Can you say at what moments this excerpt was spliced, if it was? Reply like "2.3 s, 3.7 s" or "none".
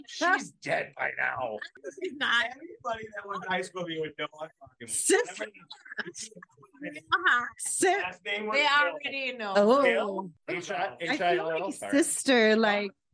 1.7 s, 10.4 s